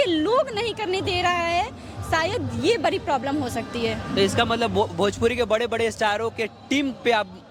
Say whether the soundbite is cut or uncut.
uncut